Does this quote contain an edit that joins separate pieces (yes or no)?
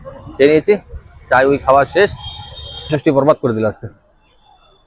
yes